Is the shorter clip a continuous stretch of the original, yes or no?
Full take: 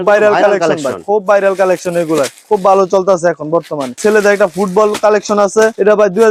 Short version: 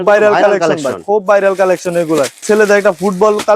no